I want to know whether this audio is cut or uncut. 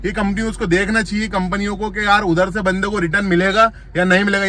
uncut